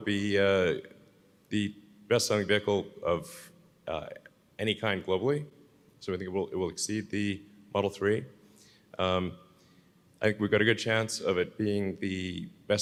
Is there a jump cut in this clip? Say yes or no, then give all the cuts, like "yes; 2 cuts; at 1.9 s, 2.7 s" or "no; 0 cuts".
no; 0 cuts